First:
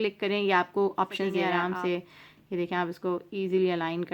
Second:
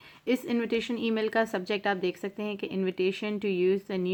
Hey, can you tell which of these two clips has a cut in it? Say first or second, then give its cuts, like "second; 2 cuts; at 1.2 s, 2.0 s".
first; 1 cut; at 1.5 s